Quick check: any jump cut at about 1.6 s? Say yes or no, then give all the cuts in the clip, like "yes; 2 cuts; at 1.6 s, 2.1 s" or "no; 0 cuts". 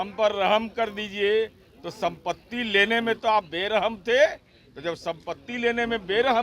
no; 0 cuts